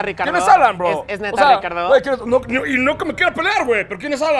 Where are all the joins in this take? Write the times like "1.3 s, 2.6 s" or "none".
none